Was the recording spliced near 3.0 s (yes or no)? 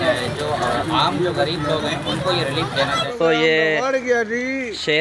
yes